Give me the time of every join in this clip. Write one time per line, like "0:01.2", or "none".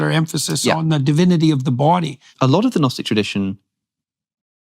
0:02.3

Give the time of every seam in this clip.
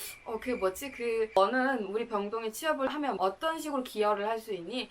0:01.4

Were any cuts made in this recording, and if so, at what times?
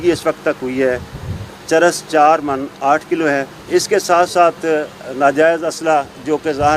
0:03.6

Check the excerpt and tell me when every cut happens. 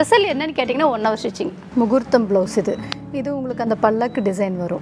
0:01.6

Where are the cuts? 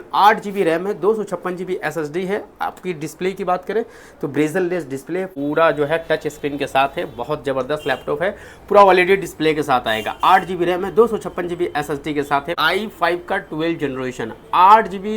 0:05.3
0:12.5

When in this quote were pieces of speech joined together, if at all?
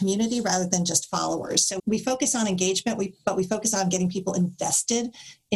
0:01.7

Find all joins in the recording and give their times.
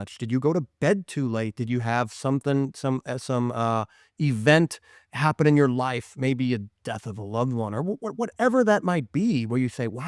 none

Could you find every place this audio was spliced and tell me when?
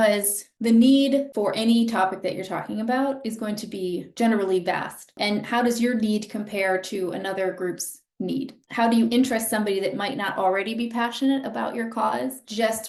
none

